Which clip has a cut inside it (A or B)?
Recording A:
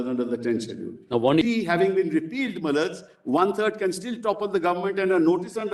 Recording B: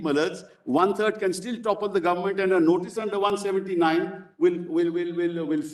A